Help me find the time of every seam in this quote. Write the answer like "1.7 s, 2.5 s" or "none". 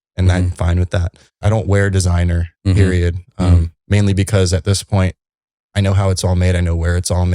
1.4 s